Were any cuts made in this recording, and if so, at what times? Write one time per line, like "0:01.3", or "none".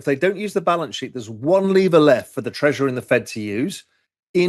none